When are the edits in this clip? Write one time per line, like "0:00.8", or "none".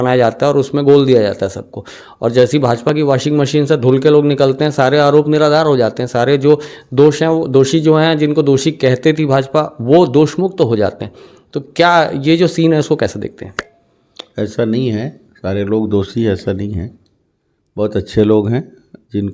none